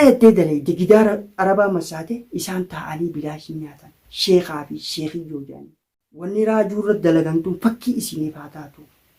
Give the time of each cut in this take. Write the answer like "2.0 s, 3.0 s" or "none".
6.3 s